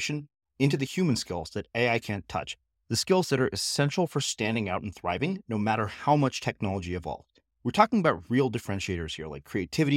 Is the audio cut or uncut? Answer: uncut